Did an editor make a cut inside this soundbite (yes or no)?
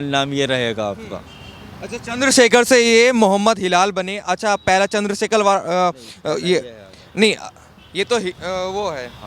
no